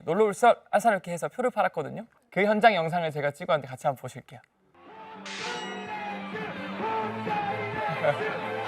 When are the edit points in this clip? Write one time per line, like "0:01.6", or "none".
0:02.2

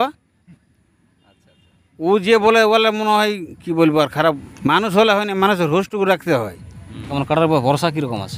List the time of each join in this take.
0:04.5
0:07.1

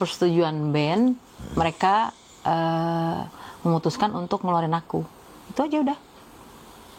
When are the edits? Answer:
none

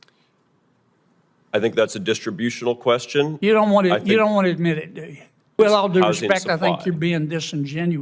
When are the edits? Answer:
0:05.5

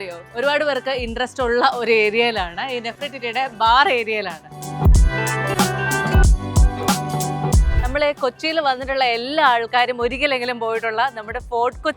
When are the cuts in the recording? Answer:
0:04.6
0:07.7

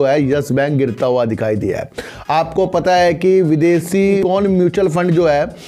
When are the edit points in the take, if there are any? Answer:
none

